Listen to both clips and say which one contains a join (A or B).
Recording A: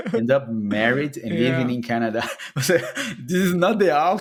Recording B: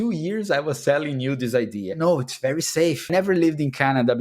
B